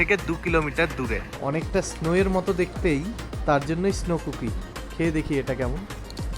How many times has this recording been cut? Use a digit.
1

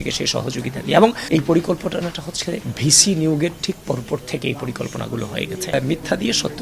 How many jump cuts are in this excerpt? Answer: 2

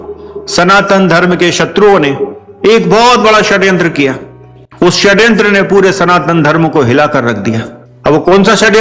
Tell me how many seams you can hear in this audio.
0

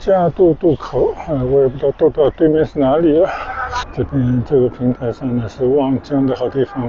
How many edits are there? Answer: 1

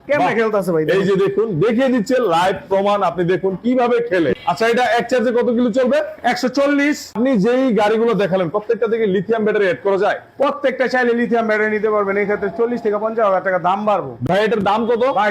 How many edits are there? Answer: 3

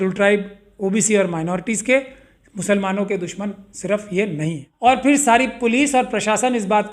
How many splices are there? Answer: 1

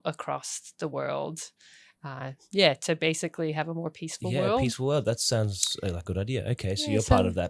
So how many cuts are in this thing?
0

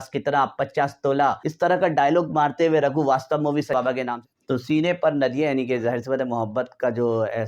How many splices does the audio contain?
2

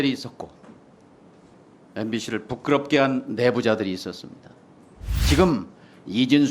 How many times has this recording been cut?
1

